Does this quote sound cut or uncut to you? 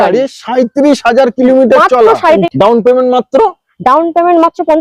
cut